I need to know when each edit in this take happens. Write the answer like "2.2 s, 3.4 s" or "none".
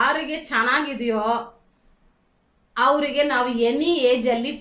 none

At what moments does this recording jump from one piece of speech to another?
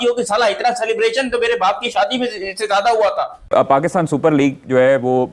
3.4 s

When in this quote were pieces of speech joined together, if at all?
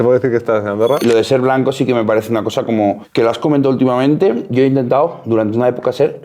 1.0 s, 4.5 s

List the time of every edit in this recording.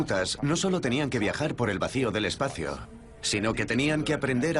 2.0 s

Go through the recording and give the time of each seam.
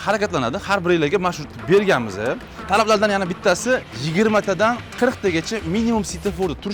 2.5 s, 4.0 s, 4.9 s

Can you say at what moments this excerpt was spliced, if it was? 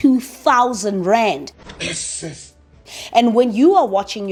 none

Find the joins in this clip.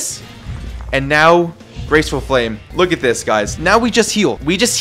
2.6 s, 4.1 s

